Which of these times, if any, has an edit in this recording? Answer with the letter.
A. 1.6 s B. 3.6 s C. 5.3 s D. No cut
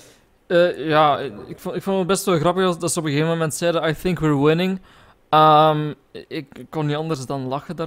B